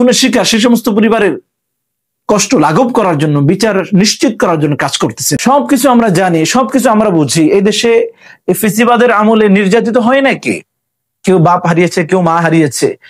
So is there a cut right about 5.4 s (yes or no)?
yes